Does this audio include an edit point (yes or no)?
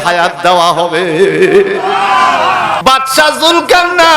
yes